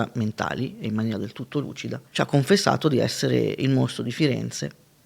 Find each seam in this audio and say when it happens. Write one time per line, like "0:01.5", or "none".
0:02.0